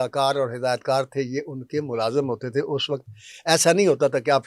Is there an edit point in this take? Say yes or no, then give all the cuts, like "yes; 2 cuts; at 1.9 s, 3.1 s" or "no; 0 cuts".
no; 0 cuts